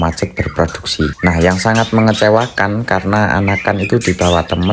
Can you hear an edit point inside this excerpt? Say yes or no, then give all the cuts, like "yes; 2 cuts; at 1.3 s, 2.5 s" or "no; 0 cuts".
yes; 1 cut; at 1.2 s